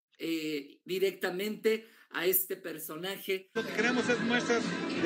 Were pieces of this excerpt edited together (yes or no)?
yes